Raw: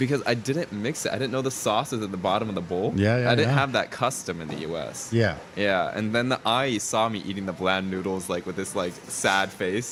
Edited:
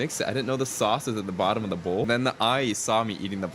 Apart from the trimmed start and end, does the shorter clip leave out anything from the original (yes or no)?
yes